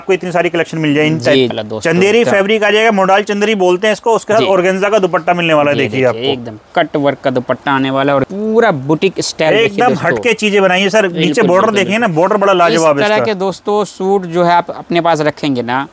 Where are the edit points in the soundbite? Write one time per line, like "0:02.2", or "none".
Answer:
0:01.5
0:08.2